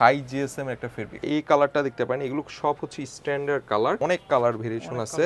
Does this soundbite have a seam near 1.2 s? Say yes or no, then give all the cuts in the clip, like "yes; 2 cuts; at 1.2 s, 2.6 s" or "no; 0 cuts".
yes; 2 cuts; at 1.2 s, 4.0 s